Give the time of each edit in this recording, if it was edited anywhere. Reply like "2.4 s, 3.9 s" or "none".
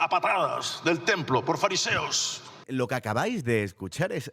none